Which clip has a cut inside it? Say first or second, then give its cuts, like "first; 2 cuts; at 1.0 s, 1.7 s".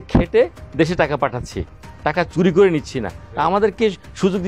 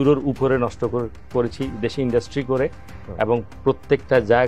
first; 1 cut; at 3.2 s